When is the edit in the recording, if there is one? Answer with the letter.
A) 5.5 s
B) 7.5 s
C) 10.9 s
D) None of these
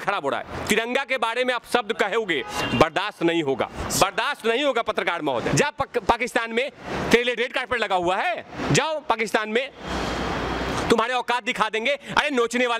A